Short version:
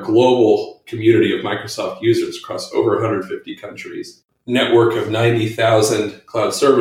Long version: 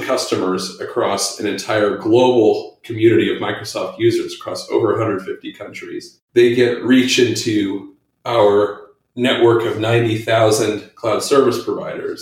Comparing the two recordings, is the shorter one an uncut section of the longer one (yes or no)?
no